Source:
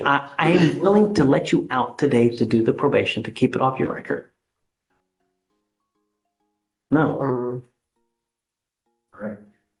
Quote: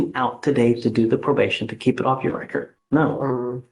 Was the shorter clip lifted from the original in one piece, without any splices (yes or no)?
no